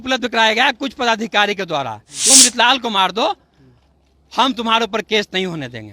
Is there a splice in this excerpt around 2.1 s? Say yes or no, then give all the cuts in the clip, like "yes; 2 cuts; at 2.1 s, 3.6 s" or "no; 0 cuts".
yes; 1 cut; at 2.1 s